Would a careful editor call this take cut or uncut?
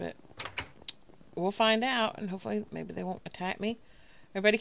cut